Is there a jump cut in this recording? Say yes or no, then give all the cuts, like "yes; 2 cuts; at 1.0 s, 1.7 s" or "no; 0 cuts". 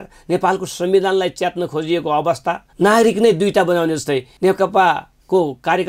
yes; 2 cuts; at 2.7 s, 4.3 s